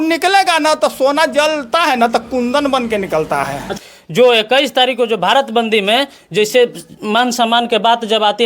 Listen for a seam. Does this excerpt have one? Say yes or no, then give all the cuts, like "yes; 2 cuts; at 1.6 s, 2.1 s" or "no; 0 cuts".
yes; 1 cut; at 3.7 s